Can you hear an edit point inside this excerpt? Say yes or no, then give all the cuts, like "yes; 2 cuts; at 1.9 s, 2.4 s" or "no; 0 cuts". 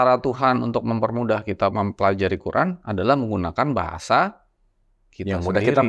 yes; 1 cut; at 1.7 s